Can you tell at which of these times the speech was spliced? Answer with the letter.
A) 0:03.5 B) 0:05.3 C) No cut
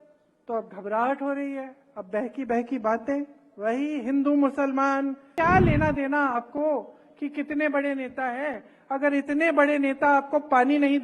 B